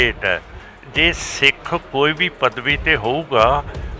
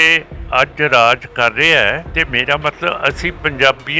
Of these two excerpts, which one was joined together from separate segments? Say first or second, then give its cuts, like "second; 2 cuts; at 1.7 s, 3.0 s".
second; 1 cut; at 2.1 s